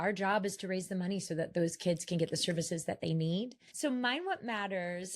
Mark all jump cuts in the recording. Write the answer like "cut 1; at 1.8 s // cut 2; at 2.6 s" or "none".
cut 1; at 3.6 s